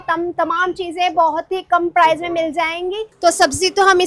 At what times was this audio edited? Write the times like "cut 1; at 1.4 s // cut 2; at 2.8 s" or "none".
cut 1; at 3.1 s